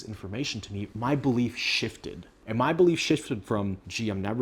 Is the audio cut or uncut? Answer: uncut